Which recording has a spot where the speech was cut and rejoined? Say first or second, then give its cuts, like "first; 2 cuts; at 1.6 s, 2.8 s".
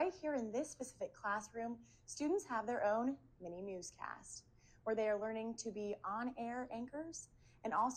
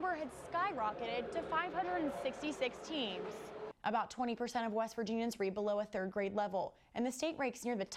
second; 1 cut; at 3.6 s